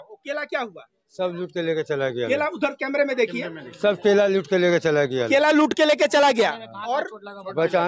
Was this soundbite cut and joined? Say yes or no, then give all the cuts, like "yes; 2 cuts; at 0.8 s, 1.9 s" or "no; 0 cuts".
no; 0 cuts